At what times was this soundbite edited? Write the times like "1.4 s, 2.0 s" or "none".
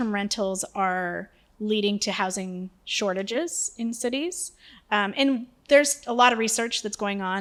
none